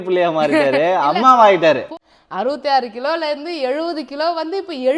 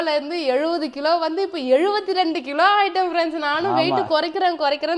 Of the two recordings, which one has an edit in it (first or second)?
first